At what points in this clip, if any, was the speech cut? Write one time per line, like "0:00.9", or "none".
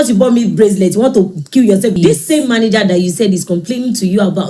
0:02.0